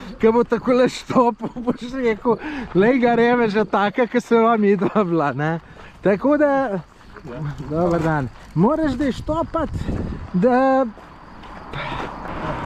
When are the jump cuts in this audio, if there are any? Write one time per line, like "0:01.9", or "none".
none